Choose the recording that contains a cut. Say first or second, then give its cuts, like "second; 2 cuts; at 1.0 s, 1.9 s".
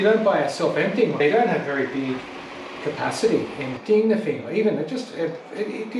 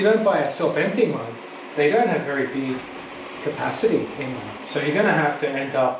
first; 2 cuts; at 1.2 s, 3.7 s